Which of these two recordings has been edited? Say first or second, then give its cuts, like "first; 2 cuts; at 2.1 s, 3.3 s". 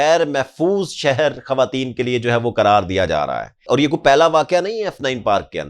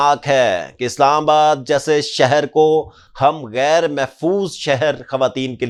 first; 1 cut; at 3.7 s